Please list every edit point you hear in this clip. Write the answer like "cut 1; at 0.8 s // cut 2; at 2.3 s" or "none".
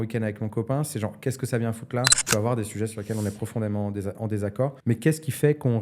cut 1; at 2.2 s // cut 2; at 4.8 s